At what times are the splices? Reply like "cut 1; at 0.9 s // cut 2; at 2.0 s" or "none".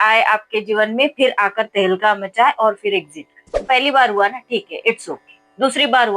cut 1; at 3.6 s